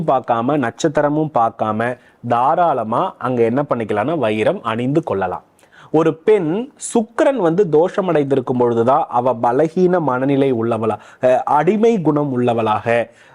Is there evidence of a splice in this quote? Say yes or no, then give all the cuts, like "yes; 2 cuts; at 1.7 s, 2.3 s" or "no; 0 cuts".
no; 0 cuts